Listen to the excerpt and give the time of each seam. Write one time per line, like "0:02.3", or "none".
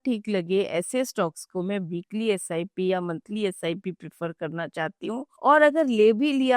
none